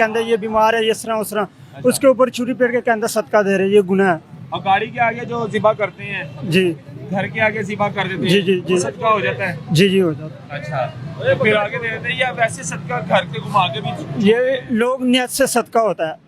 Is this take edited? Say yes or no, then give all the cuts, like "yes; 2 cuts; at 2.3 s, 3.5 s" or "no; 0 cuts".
no; 0 cuts